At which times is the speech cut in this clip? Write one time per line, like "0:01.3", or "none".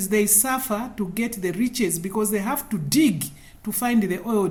none